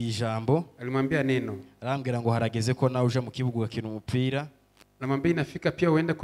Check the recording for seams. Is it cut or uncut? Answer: uncut